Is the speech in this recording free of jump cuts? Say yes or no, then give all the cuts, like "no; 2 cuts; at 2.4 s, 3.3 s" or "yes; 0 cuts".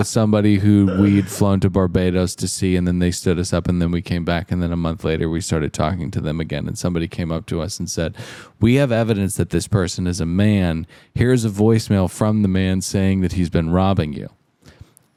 yes; 0 cuts